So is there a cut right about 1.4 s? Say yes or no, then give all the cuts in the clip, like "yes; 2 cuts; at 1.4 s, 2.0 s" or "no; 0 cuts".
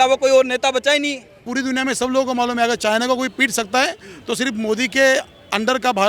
yes; 1 cut; at 1.4 s